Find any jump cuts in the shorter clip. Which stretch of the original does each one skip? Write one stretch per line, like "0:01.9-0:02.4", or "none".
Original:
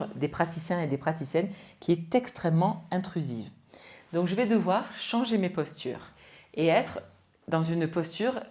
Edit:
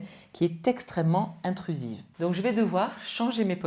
0:03.5-0:03.9